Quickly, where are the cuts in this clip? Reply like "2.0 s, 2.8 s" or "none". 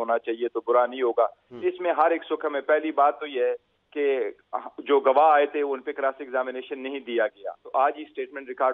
1.5 s, 7.6 s

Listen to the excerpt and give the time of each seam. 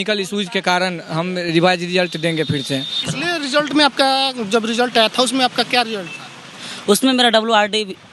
2.9 s

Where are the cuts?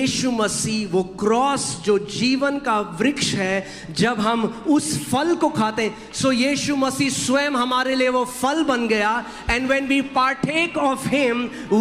none

